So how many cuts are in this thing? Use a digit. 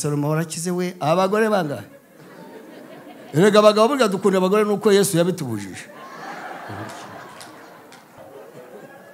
1